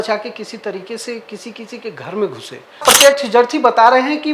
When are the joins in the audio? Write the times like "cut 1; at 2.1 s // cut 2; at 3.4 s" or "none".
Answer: cut 1; at 2.8 s